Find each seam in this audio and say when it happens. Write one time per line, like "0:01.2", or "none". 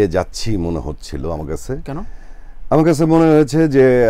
none